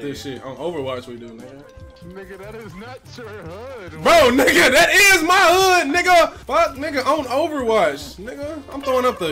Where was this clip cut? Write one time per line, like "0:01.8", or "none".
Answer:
none